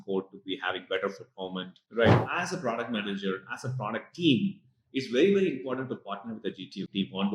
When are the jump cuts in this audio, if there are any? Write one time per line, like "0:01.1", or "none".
0:02.2